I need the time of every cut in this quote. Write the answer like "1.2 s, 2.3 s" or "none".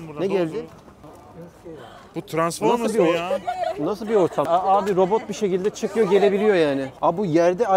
1.0 s, 4.5 s, 6.9 s